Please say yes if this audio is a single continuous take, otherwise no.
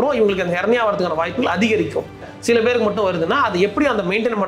no